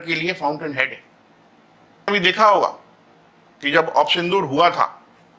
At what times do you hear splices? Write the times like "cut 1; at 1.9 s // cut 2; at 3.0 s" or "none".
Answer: cut 1; at 2.1 s

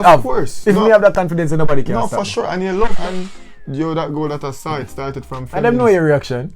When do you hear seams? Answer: cut 1; at 3.0 s

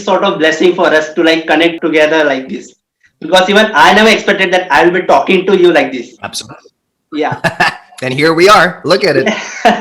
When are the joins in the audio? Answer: cut 1; at 1.8 s

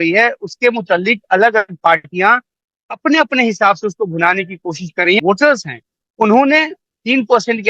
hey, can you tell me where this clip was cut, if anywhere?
cut 1; at 5.2 s

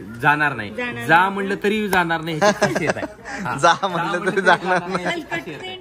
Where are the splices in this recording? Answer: none

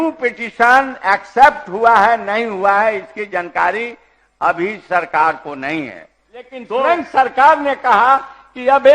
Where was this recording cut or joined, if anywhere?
cut 1; at 6.6 s

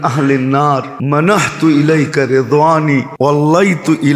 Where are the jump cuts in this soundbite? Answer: cut 1; at 0.9 s // cut 2; at 3.3 s

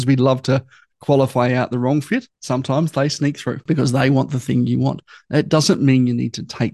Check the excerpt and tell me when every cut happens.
cut 1; at 2.4 s // cut 2; at 3.6 s

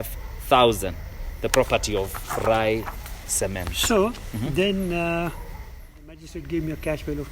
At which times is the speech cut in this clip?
cut 1; at 6.2 s

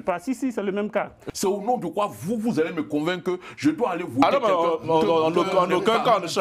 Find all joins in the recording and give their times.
cut 1; at 1.2 s

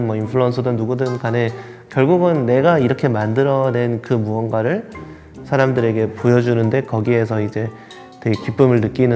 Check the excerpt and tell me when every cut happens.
none

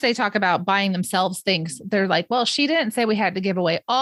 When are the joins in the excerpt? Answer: none

